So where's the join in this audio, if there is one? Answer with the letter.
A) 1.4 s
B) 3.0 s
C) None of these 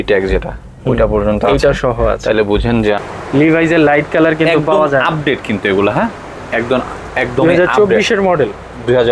B